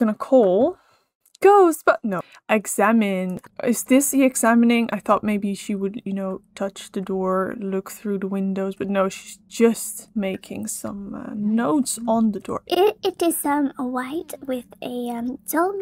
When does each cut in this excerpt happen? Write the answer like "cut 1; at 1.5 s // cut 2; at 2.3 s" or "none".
cut 1; at 2.3 s // cut 2; at 3.4 s // cut 3; at 9.9 s